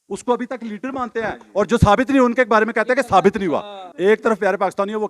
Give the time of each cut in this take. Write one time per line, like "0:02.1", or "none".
0:03.8